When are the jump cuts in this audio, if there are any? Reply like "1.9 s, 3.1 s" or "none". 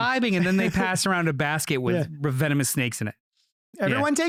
none